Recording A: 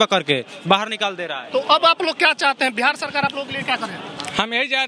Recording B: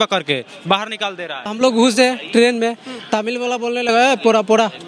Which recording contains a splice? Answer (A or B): B